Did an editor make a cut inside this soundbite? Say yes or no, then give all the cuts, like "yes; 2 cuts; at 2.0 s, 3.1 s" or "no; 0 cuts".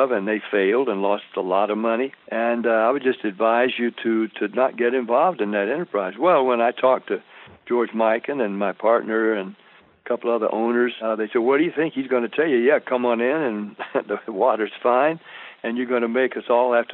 yes; 2 cuts; at 2.2 s, 11.0 s